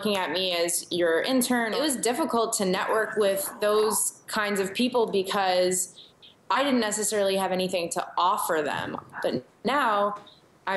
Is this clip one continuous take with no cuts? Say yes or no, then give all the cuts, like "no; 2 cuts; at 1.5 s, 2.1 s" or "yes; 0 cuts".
no; 2 cuts; at 1.7 s, 9.1 s